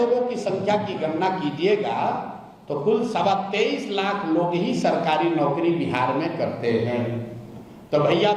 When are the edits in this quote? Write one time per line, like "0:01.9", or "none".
none